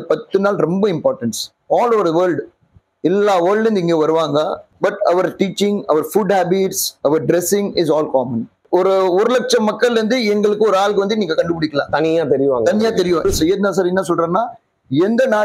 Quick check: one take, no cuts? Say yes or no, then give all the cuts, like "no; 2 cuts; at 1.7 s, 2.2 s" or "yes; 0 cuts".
no; 3 cuts; at 4.6 s, 8.6 s, 13.2 s